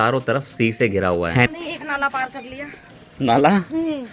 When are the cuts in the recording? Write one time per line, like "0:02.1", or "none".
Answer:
0:01.5